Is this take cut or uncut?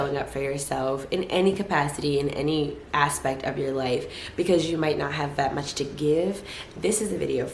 uncut